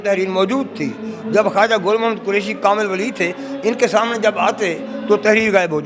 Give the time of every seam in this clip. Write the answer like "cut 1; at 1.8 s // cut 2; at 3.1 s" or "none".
none